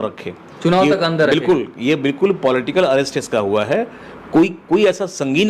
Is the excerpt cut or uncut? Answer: uncut